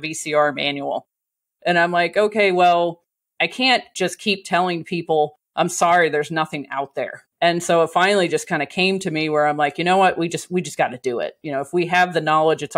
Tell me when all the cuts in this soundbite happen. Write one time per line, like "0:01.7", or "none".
0:07.1